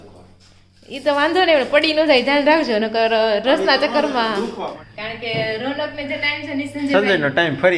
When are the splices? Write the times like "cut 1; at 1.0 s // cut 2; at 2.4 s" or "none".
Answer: cut 1; at 4.7 s